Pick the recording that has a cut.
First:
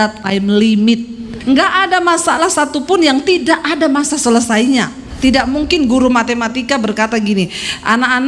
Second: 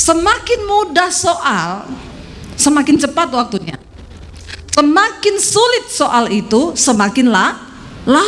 first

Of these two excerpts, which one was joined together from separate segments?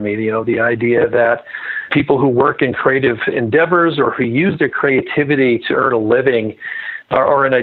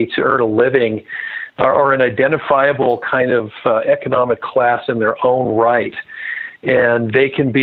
first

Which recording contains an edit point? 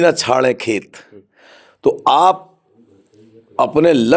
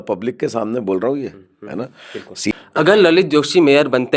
second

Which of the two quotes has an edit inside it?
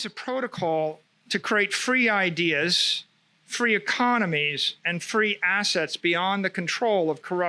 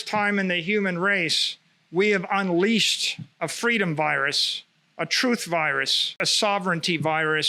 second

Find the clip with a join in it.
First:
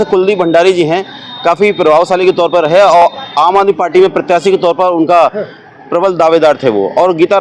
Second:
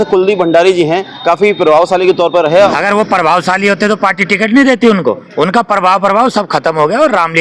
second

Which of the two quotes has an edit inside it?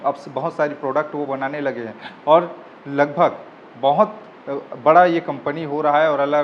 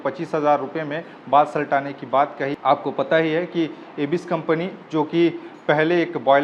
second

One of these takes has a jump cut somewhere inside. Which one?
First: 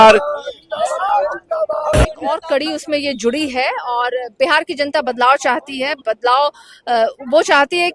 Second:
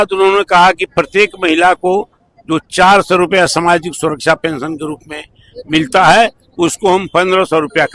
first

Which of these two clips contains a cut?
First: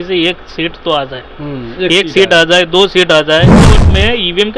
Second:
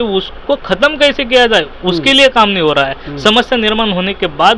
first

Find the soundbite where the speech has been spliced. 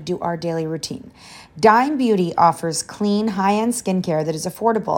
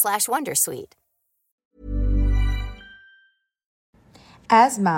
second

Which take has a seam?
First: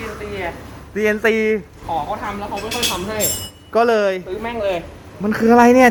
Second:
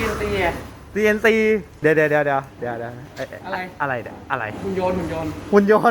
second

